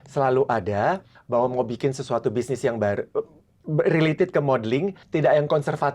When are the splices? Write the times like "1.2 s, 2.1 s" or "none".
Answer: 1.1 s, 5.0 s